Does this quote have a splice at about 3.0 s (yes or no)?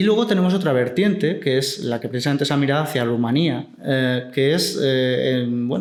no